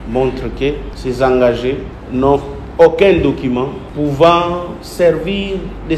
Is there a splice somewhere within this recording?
no; 0 cuts

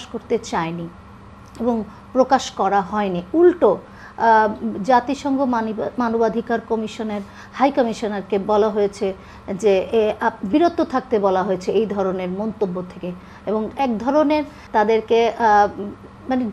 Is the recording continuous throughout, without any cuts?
no; 2 cuts; at 13.7 s, 14.6 s

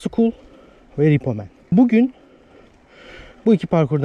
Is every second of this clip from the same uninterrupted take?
no; 1 cut; at 1.7 s

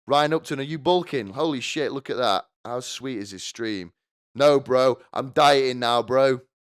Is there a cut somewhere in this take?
no; 0 cuts

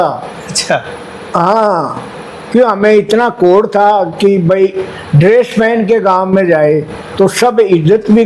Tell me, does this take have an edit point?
no; 0 cuts

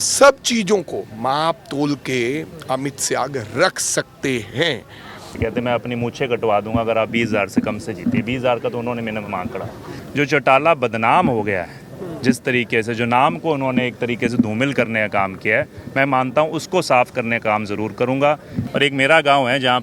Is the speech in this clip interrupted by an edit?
yes; 3 cuts; at 5.3 s, 10.0 s, 18.5 s

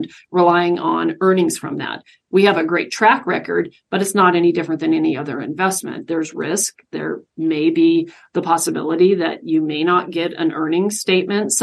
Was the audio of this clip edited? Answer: no; 0 cuts

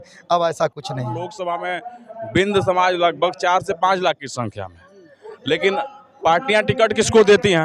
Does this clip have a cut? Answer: yes; 1 cut; at 1.3 s

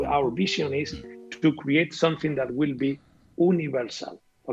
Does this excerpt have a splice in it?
no; 0 cuts

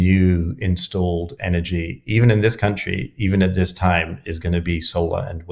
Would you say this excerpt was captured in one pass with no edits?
yes; 0 cuts

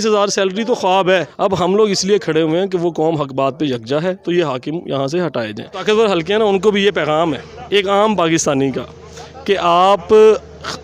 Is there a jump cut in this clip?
yes; 2 cuts; at 1.3 s, 5.8 s

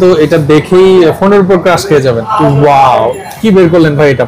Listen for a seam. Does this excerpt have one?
yes; 1 cut; at 2.3 s

